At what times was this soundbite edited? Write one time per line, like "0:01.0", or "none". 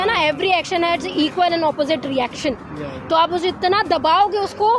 none